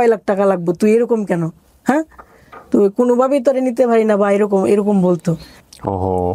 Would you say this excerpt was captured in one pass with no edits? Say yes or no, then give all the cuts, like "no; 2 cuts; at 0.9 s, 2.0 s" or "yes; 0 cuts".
yes; 0 cuts